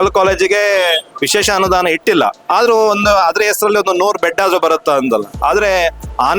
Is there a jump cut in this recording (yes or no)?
yes